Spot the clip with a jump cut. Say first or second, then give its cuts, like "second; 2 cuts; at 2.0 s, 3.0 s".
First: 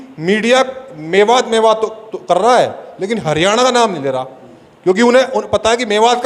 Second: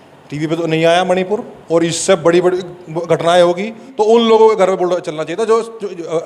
second; 1 cut; at 3.8 s